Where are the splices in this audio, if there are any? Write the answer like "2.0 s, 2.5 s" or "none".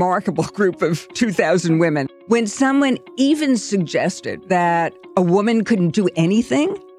2.1 s, 4.3 s